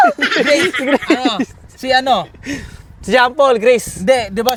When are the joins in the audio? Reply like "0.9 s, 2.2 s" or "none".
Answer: none